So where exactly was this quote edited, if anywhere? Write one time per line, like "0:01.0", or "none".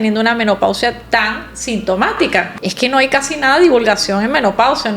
0:02.5